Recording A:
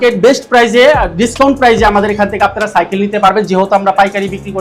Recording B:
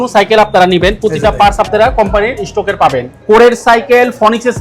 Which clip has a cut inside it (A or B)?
B